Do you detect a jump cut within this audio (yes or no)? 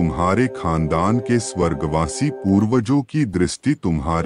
no